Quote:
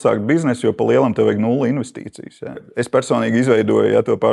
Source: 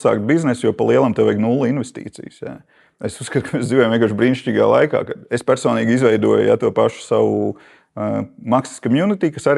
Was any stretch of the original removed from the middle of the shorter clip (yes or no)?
yes